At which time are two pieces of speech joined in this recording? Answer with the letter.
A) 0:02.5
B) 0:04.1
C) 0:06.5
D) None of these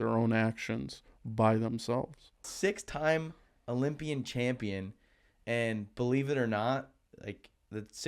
A